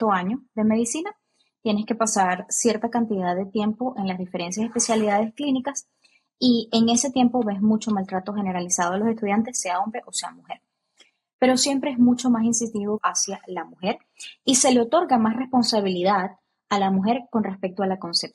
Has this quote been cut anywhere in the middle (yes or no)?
yes